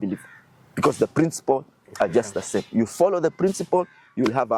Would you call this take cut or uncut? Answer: uncut